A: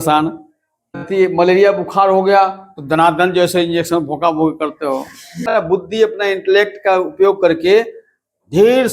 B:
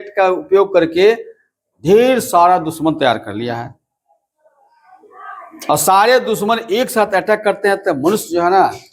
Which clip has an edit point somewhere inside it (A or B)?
A